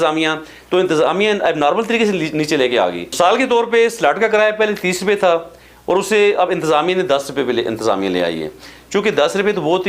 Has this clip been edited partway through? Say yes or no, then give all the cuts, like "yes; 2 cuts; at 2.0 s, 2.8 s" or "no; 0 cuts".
no; 0 cuts